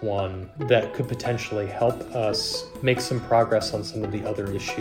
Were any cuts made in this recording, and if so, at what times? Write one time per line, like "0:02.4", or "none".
none